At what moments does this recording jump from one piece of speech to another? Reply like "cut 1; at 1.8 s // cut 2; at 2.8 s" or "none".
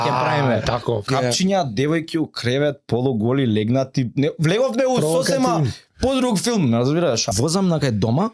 cut 1; at 1.1 s // cut 2; at 7.3 s